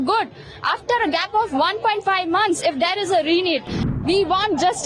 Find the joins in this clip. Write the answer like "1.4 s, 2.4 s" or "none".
3.9 s